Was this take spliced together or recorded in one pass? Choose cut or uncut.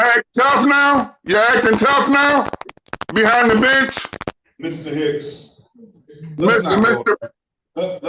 uncut